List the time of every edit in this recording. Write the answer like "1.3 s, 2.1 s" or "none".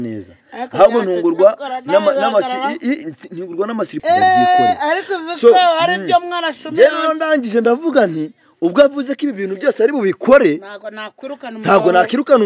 4.0 s